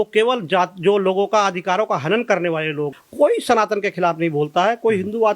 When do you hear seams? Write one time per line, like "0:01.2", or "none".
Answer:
0:02.9